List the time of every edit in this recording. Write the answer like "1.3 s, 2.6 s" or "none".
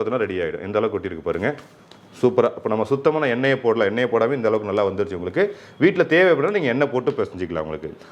none